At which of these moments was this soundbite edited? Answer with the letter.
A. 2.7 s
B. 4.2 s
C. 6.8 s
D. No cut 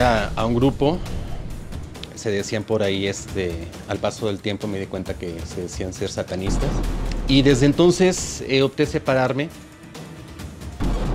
C